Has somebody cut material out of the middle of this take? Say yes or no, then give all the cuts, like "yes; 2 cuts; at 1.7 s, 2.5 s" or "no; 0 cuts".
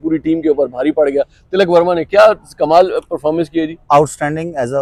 no; 0 cuts